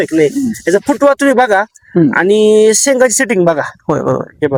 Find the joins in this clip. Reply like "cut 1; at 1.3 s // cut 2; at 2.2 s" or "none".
none